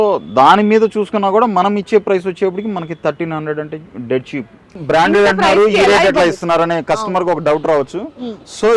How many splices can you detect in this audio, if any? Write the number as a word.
one